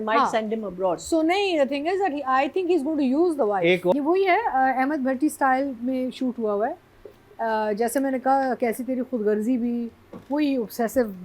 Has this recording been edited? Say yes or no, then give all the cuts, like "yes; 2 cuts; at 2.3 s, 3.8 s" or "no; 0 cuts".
yes; 1 cut; at 3.9 s